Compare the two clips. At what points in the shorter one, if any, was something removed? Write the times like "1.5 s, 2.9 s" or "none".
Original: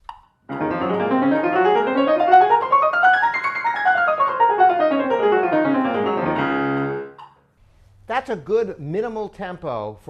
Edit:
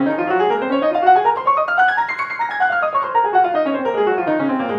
none